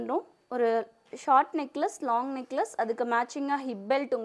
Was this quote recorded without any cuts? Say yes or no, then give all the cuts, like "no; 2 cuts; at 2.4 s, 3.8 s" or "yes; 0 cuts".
yes; 0 cuts